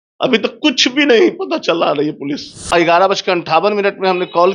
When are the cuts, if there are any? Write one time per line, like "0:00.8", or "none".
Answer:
0:02.7

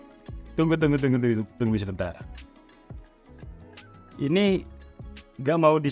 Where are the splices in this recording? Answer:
none

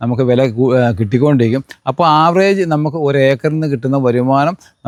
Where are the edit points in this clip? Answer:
none

